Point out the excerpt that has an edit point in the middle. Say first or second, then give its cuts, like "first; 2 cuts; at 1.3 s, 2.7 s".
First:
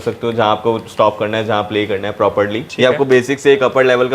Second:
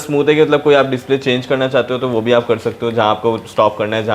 first; 1 cut; at 2.6 s